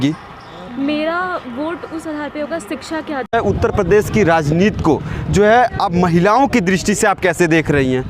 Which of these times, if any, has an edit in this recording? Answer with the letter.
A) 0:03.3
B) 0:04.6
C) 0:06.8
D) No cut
A